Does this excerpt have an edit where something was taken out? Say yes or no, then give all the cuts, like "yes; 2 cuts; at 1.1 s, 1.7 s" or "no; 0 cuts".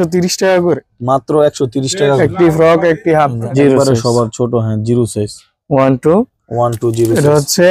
yes; 1 cut; at 3.4 s